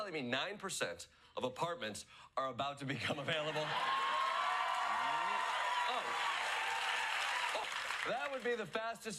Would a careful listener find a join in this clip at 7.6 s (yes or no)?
yes